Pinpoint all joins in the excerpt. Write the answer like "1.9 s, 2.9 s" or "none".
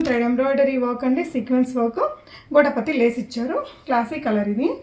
none